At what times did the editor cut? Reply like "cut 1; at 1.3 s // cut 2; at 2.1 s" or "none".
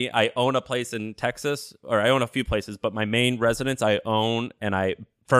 none